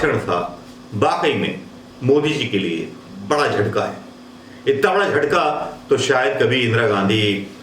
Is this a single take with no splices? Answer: yes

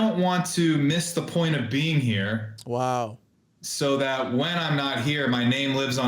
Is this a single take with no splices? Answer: yes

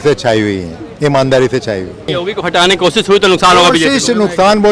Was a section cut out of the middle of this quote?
yes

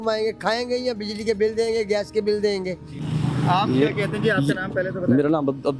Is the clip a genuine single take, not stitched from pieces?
yes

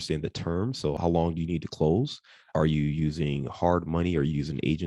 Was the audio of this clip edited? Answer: yes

